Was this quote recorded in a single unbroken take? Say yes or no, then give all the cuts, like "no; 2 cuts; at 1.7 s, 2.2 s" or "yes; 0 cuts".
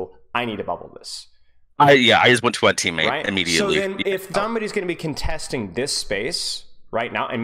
no; 1 cut; at 4.3 s